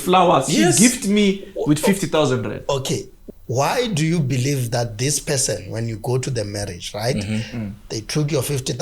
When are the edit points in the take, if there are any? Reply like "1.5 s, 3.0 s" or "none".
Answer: 3.2 s